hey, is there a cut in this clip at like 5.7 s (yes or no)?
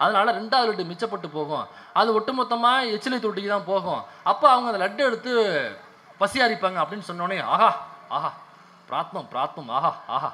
no